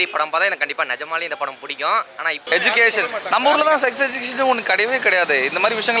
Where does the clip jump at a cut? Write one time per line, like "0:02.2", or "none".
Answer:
0:02.4